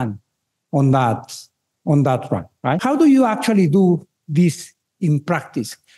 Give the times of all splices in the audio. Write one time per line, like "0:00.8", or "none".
0:02.8